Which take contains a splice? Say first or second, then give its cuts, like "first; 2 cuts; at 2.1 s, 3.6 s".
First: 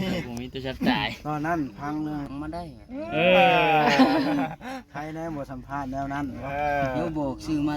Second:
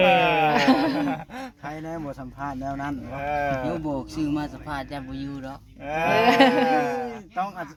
first; 1 cut; at 2.3 s